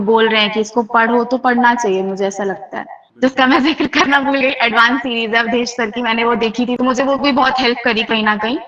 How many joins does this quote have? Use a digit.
2